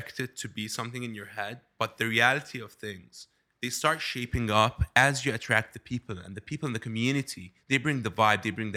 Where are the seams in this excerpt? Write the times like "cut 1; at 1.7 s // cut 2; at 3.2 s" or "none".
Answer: none